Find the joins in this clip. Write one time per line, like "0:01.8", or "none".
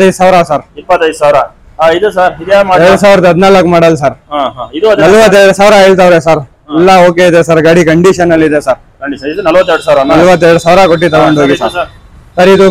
none